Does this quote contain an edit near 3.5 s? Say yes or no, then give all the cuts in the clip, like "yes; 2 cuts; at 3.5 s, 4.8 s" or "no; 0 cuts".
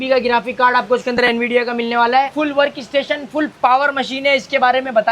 no; 1 cut; at 2.3 s